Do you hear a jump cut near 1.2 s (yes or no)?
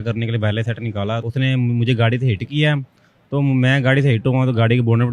yes